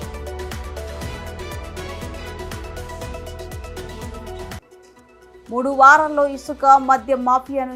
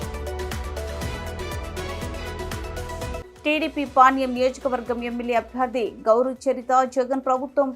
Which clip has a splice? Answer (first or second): second